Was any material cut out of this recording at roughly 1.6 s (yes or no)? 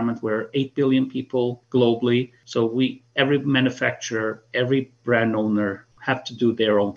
yes